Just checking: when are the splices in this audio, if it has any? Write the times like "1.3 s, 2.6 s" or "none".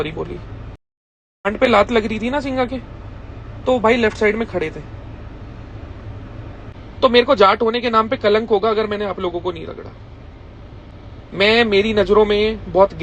6.7 s